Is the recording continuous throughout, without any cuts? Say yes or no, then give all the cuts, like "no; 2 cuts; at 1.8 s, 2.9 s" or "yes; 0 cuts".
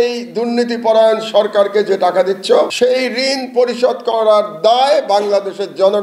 no; 1 cut; at 2.7 s